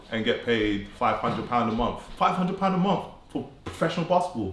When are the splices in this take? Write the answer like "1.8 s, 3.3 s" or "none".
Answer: 2.0 s